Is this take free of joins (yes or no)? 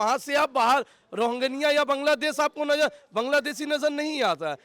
yes